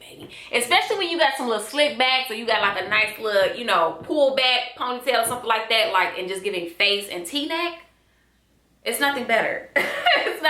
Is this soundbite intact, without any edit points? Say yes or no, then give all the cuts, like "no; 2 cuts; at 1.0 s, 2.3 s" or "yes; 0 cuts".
yes; 0 cuts